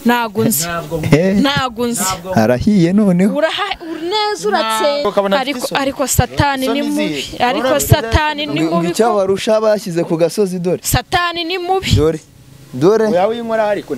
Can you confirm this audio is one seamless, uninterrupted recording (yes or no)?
no